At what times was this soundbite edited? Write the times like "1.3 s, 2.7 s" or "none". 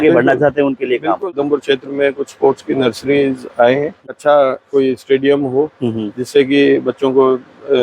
1.3 s, 4.0 s